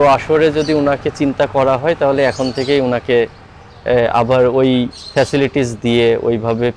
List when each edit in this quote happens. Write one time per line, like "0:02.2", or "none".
none